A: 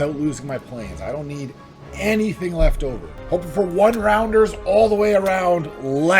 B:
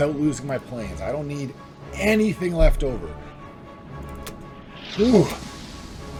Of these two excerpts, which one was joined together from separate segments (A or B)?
A